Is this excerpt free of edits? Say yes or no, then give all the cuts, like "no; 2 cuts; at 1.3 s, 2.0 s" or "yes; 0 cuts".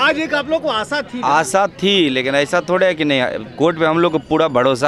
yes; 0 cuts